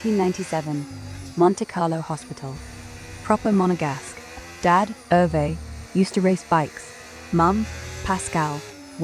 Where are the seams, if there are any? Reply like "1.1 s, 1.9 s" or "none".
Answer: none

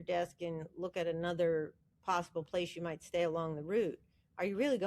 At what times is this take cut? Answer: none

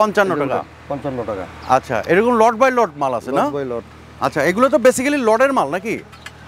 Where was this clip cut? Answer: none

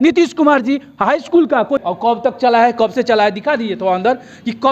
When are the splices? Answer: 1.8 s

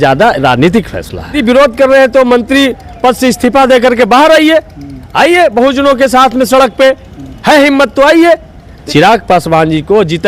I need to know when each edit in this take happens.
1.4 s, 8.7 s

